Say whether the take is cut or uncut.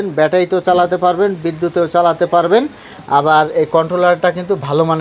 uncut